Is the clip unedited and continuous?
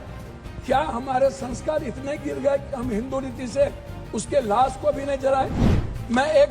no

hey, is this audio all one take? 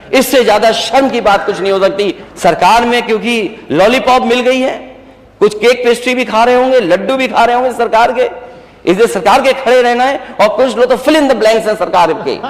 no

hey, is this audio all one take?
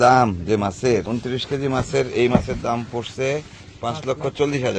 no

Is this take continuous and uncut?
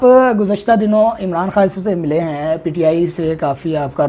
yes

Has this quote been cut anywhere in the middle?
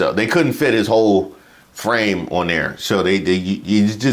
no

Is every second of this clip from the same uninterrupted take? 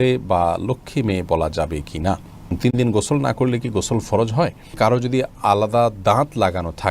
no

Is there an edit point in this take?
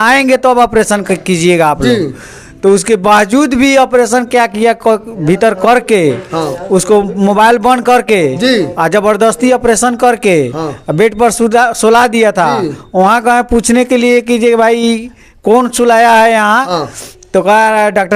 no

